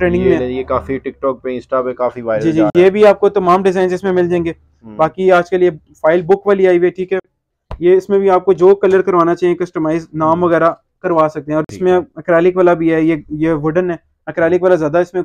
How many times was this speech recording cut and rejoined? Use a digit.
0